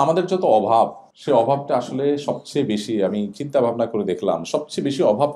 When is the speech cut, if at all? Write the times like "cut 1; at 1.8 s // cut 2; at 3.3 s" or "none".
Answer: cut 1; at 1.1 s